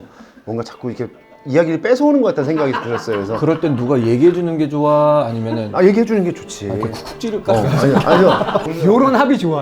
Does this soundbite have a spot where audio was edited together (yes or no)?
yes